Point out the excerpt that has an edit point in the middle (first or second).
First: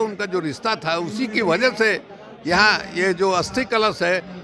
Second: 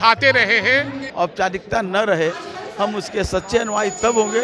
second